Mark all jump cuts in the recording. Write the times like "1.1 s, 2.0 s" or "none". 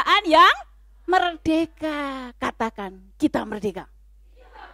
none

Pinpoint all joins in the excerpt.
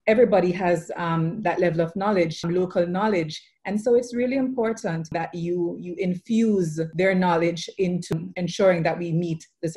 2.4 s, 5.1 s, 6.8 s, 8.1 s

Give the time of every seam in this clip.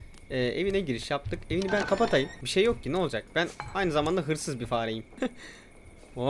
2.4 s, 5.2 s

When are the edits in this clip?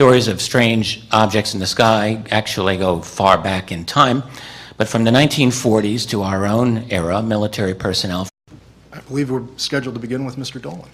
none

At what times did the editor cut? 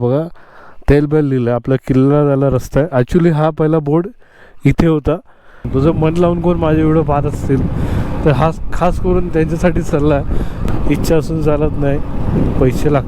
5.6 s, 10.6 s

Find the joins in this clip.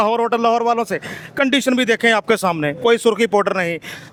none

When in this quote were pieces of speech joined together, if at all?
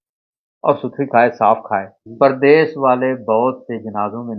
2.0 s

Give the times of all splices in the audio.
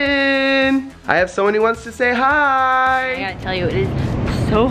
1.0 s, 3.4 s

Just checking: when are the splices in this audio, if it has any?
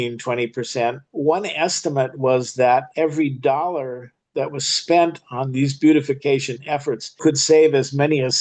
1.0 s, 2.9 s, 7.2 s

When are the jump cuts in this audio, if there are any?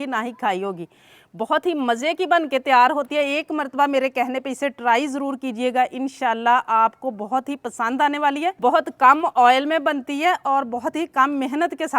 8.6 s

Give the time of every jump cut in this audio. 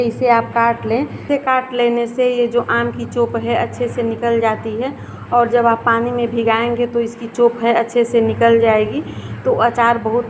1.4 s

